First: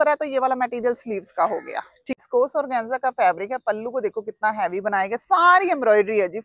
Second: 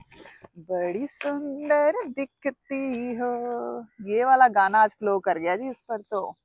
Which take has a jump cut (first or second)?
first